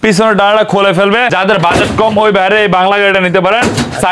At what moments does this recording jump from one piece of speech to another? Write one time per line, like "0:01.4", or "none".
0:01.3

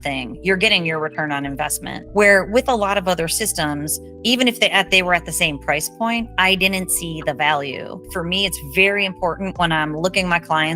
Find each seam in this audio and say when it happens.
0:01.9
0:08.1

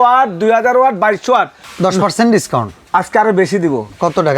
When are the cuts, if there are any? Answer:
0:01.6
0:02.8

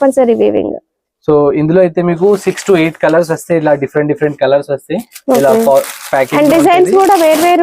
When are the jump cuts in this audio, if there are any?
none

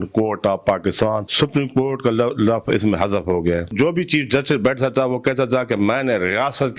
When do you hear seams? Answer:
0:01.3
0:03.7

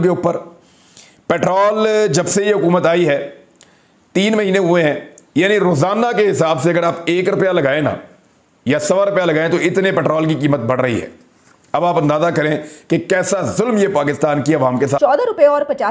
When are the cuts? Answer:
0:15.0

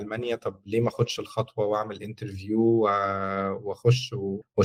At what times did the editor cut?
none

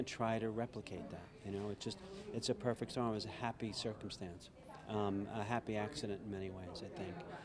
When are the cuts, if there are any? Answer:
0:02.0

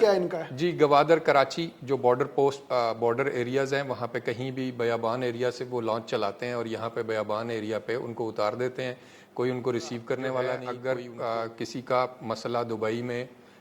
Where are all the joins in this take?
0:10.7

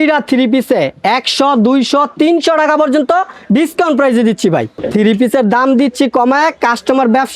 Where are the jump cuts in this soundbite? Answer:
0:04.8

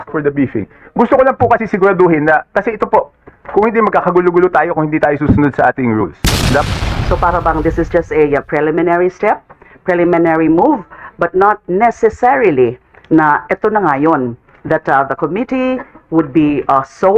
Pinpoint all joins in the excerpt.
0:06.7

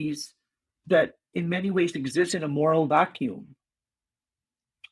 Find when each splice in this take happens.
none

